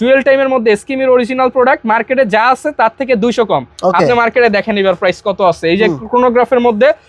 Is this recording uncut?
yes; 0 cuts

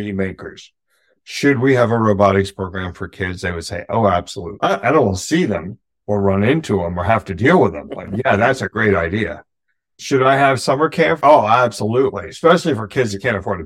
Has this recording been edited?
no; 0 cuts

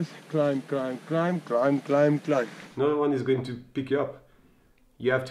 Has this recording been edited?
yes; 1 cut; at 2.6 s

